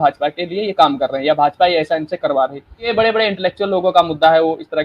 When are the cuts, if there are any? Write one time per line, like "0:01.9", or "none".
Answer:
0:02.9

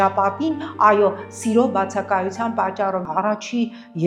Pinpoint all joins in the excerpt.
0:03.1

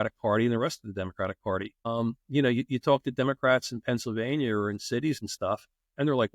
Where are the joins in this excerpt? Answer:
0:01.9

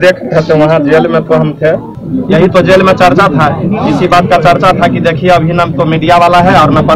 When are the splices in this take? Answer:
0:01.9

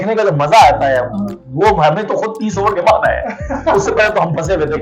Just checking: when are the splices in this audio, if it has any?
none

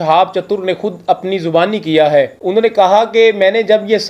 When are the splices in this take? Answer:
0:02.4

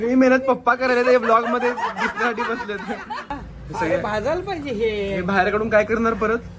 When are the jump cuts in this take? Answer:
0:03.3

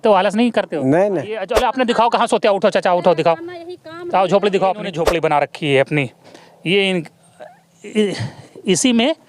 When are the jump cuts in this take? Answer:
0:01.5
0:05.0

